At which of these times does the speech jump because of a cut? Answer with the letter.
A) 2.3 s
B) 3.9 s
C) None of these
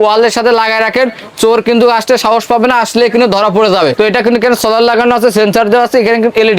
B